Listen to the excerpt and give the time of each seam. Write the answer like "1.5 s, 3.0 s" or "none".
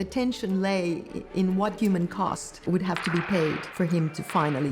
1.8 s, 3.6 s